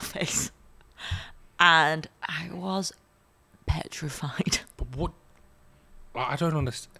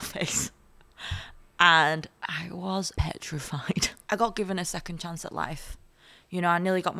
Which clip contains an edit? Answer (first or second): second